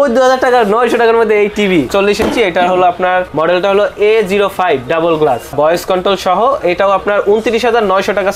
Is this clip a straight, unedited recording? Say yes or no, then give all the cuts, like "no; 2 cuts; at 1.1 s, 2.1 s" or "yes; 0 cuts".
no; 3 cuts; at 1.9 s, 3.3 s, 5.5 s